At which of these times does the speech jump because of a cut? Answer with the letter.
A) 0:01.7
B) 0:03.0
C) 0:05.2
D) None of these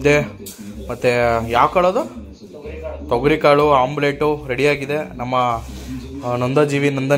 D